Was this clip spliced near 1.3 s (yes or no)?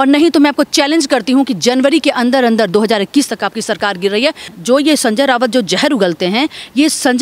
no